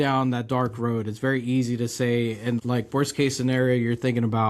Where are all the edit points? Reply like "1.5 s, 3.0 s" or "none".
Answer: 2.6 s